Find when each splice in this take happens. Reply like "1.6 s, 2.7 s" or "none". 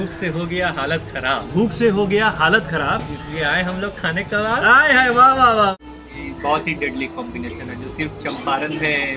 5.7 s